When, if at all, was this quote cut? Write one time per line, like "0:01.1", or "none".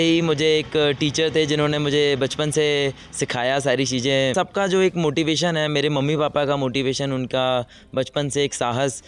0:04.3